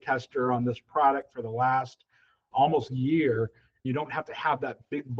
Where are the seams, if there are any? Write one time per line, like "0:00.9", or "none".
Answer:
0:02.4
0:03.9